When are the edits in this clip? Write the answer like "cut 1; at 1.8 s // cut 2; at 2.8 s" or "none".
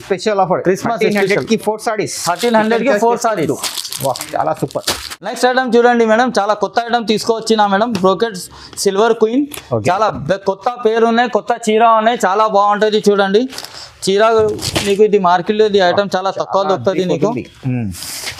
none